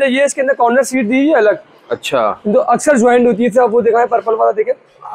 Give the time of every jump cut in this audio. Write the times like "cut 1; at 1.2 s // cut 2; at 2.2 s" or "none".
none